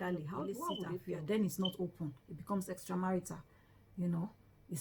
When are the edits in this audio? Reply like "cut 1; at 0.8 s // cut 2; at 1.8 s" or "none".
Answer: cut 1; at 1.0 s